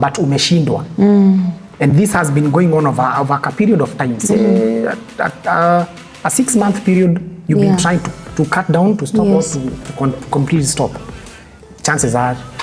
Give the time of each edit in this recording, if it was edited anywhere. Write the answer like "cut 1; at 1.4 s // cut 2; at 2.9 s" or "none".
none

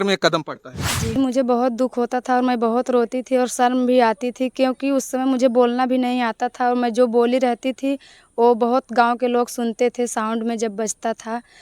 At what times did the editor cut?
cut 1; at 1.1 s

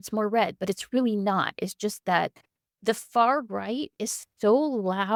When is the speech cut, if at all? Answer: none

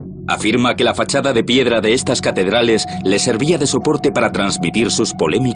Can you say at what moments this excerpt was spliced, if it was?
none

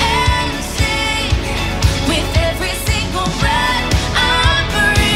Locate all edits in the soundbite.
none

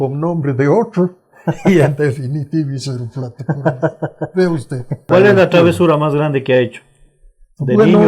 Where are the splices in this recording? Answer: cut 1; at 5.1 s

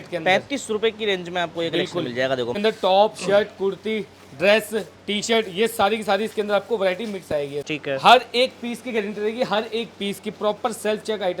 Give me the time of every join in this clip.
cut 1; at 2.6 s // cut 2; at 7.7 s

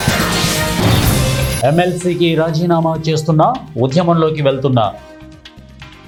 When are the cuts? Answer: none

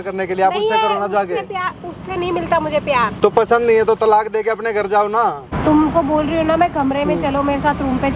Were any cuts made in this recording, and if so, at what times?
cut 1; at 3.1 s // cut 2; at 5.5 s

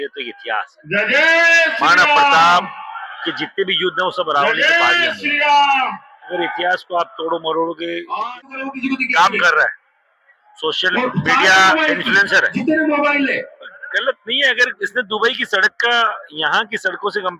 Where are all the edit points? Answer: cut 1; at 8.5 s

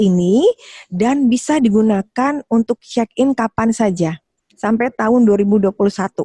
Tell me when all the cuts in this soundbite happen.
none

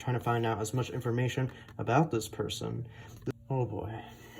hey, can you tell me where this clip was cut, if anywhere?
cut 1; at 3.2 s

